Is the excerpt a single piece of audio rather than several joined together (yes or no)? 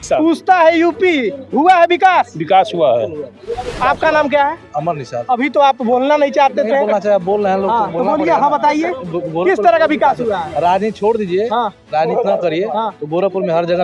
yes